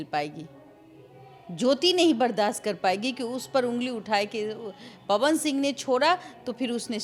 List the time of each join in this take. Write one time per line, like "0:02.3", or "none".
none